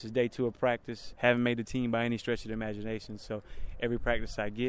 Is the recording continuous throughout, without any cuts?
no; 1 cut; at 1.0 s

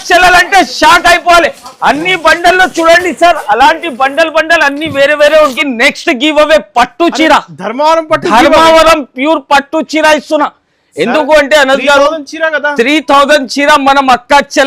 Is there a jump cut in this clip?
yes; 1 cut; at 5.6 s

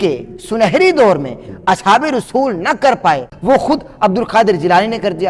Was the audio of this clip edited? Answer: yes; 1 cut; at 3.3 s

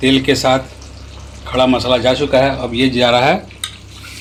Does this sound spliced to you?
no; 0 cuts

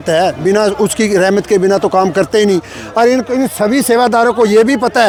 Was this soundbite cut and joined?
no; 0 cuts

